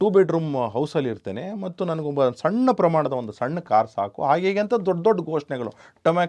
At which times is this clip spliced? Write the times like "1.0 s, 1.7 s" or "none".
none